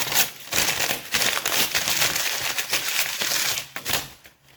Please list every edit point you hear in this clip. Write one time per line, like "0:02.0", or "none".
none